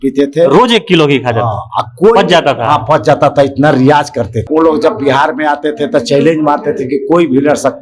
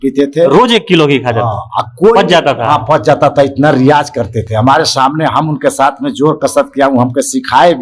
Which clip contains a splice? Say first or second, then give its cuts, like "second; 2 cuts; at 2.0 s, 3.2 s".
first; 1 cut; at 4.4 s